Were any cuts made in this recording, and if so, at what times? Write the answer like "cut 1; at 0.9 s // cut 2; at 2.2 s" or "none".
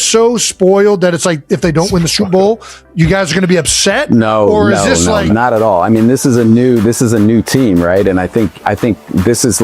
cut 1; at 5.3 s